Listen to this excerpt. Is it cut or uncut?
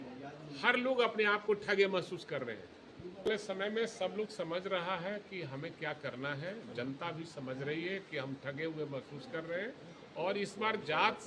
cut